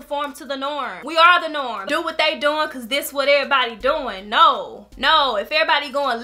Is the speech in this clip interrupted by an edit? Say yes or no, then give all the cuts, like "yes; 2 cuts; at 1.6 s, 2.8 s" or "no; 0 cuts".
yes; 1 cut; at 1.8 s